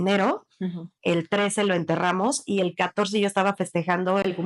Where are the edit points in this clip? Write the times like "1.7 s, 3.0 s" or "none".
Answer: none